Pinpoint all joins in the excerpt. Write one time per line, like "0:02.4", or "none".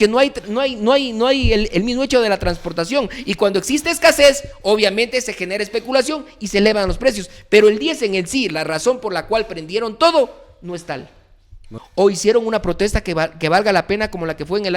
0:11.7

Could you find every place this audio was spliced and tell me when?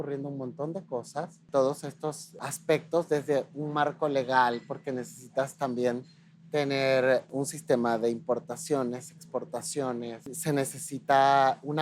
0:01.4
0:02.3
0:07.3
0:10.3

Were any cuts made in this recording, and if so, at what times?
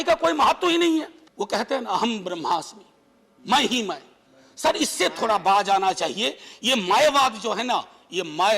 0:01.2

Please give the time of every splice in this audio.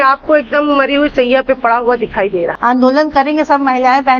0:02.5

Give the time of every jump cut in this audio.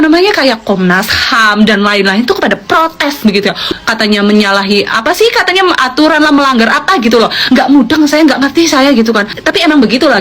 0:03.7

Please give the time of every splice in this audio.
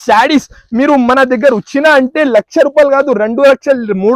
none

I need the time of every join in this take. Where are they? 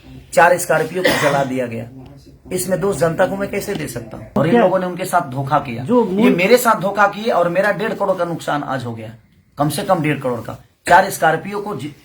0:04.4

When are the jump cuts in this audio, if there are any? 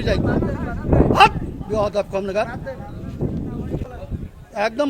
0:03.8

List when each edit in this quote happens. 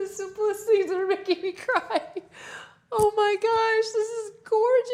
none

